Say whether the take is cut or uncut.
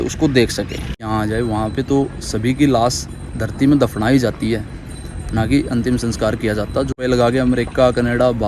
cut